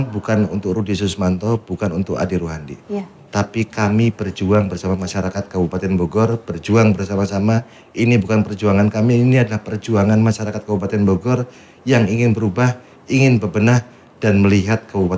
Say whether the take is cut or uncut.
uncut